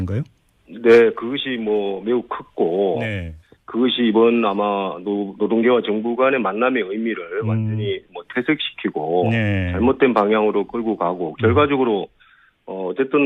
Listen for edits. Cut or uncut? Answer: cut